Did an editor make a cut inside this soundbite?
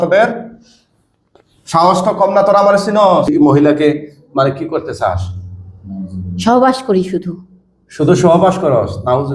yes; 1 cut; at 3.3 s

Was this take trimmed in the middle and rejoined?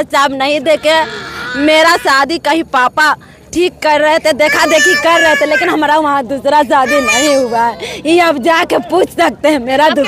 no; 0 cuts

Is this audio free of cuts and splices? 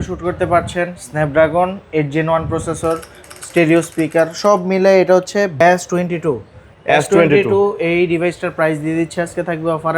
no; 1 cut; at 5.6 s

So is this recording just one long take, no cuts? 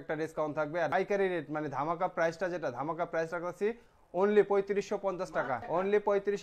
no; 2 cuts; at 0.9 s, 5.6 s

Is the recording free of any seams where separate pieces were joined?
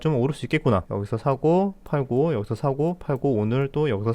no; 1 cut; at 0.9 s

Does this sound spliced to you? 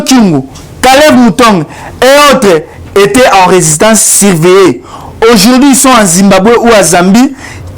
no; 0 cuts

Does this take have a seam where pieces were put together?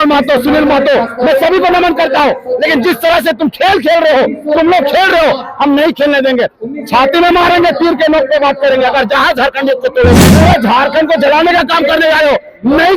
yes; 1 cut; at 10.3 s

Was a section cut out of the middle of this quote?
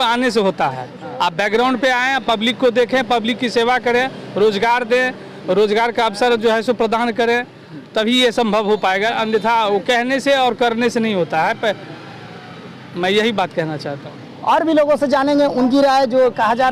no; 0 cuts

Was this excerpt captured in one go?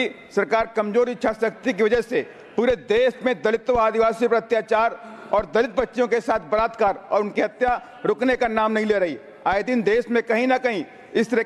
yes; 0 cuts

